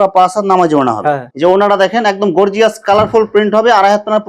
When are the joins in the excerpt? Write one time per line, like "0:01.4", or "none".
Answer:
0:01.2